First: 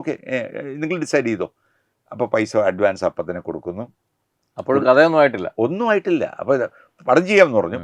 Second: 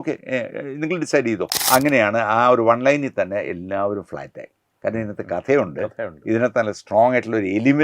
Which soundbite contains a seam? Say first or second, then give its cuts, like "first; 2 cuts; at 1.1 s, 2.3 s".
second; 1 cut; at 1.6 s